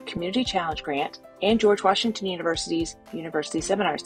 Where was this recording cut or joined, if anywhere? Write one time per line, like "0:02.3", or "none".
none